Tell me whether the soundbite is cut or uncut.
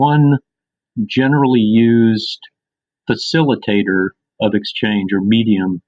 uncut